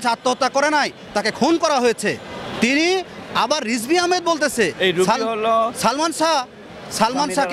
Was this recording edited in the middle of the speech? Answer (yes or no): no